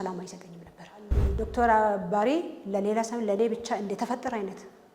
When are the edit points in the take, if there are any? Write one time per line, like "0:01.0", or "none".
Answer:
0:01.2